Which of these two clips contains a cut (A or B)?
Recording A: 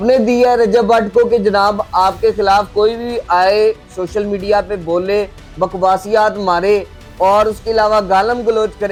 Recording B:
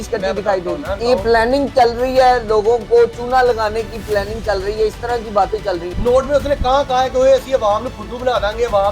B